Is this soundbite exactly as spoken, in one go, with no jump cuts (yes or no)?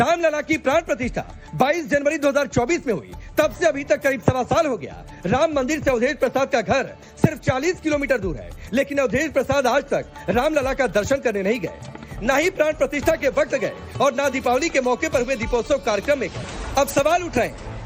no